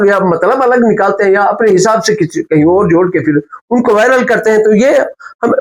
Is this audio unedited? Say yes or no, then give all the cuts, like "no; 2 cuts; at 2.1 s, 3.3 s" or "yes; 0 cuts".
yes; 0 cuts